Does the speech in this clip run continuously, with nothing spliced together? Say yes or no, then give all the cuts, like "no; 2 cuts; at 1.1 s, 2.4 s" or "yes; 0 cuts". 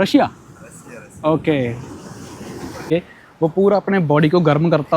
no; 1 cut; at 2.9 s